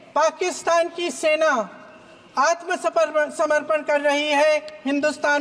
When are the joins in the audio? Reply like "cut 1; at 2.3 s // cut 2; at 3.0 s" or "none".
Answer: none